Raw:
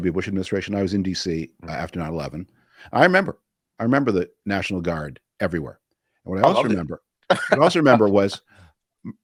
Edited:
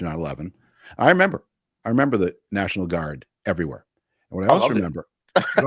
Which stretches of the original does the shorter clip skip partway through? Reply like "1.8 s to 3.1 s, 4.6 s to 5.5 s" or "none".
none

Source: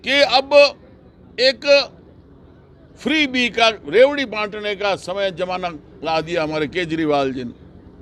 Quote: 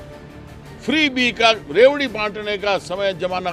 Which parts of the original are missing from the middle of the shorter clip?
none

